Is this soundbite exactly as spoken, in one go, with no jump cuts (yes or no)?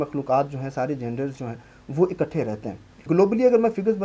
no